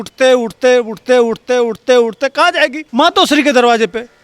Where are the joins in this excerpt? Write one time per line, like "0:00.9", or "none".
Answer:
0:02.8